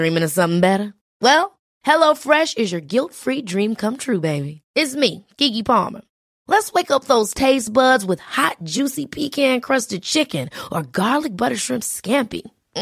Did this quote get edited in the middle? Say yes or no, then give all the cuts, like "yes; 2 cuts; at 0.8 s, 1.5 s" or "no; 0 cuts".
no; 0 cuts